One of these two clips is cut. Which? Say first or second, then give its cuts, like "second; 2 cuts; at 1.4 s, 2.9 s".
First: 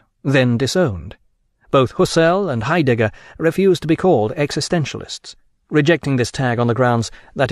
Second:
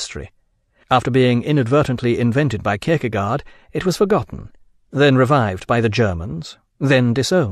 first; 1 cut; at 3.5 s